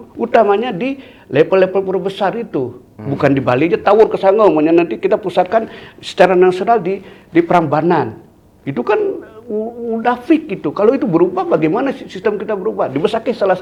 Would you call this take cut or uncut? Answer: uncut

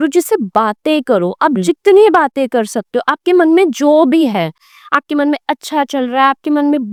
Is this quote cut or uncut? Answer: uncut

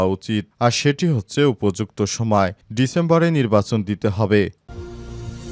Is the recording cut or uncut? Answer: cut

